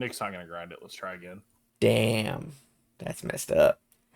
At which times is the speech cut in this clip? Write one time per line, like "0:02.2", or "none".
0:01.6

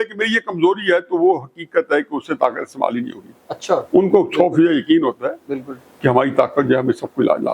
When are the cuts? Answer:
none

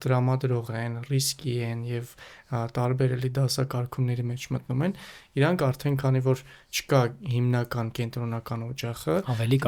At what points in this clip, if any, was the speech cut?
none

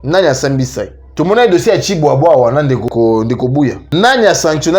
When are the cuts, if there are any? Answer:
0:01.0
0:02.9
0:03.8

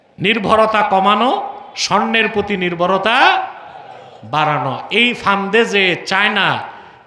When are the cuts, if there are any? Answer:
none

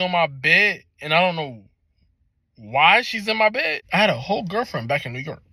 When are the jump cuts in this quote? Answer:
0:03.8

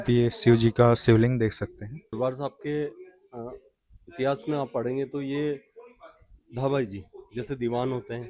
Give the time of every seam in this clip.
0:02.1

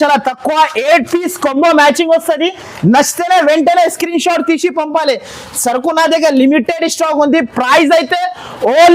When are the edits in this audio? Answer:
none

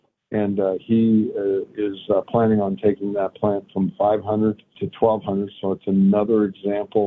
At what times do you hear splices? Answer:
0:04.8

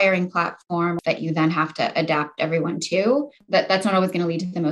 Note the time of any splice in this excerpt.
0:01.0
0:03.4

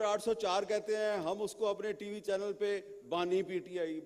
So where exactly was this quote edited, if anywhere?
none

